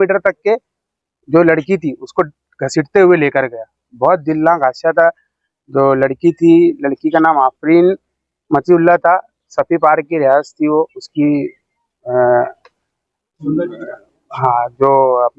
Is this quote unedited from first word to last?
yes; 0 cuts

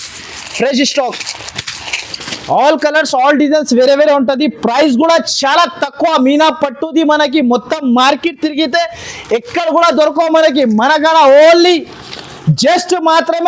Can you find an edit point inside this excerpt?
no; 0 cuts

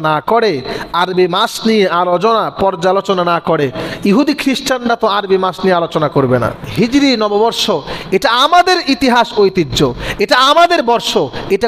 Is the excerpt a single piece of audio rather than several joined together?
no; 1 cut; at 6.6 s

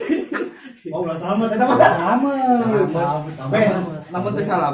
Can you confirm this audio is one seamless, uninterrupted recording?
yes; 0 cuts

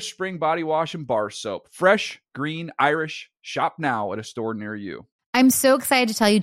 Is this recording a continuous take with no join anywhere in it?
no; 1 cut; at 5.2 s

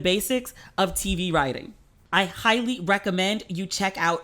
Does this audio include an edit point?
yes; 1 cut; at 1.9 s

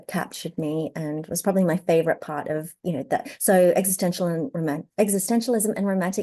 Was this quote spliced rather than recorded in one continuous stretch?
no; 0 cuts

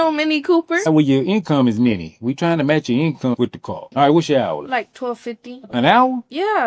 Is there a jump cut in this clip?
yes; 2 cuts; at 0.9 s, 3.9 s

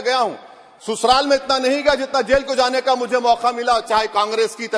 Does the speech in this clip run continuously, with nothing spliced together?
yes; 0 cuts

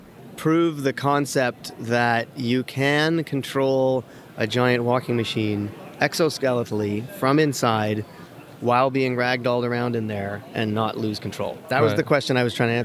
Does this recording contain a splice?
no; 0 cuts

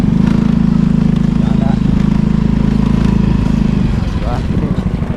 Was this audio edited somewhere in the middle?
no; 0 cuts

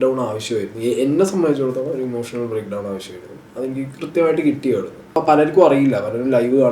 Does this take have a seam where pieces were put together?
yes; 1 cut; at 5.0 s

